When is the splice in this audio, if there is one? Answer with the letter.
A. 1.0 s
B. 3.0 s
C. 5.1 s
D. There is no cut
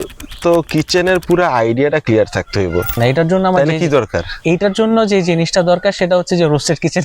B